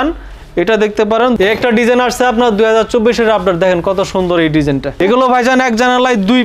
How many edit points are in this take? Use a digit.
2